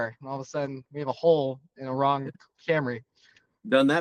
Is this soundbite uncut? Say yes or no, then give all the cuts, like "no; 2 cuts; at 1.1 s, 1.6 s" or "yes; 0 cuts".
yes; 0 cuts